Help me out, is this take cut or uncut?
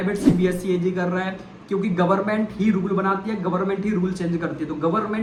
uncut